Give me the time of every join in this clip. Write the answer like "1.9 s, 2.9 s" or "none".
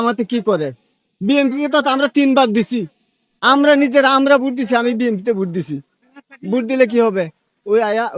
none

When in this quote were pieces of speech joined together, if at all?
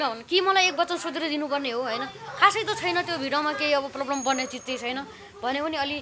none

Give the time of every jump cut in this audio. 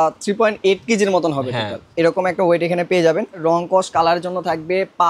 3.4 s

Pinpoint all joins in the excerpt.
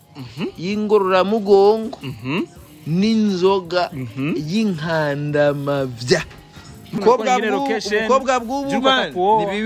7.0 s

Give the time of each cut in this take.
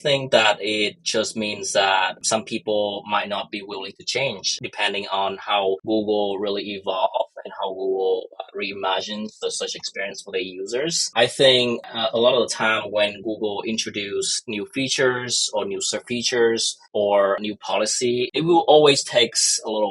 18.3 s

